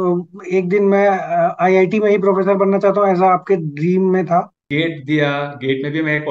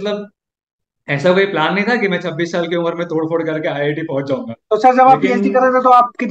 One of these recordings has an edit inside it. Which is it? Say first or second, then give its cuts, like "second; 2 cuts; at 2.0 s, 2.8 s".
first; 1 cut; at 4.6 s